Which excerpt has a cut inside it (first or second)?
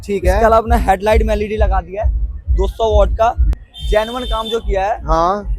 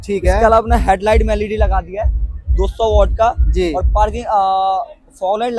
first